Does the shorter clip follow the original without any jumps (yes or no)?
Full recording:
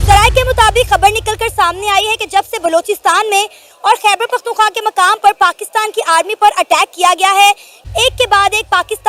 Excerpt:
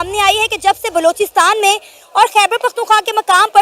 yes